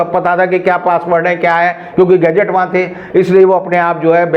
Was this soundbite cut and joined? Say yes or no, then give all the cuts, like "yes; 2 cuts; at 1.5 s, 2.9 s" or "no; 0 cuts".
no; 0 cuts